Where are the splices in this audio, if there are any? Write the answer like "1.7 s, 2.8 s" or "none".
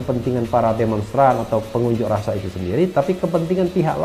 none